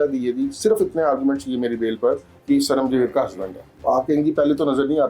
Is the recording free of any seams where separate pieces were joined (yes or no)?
no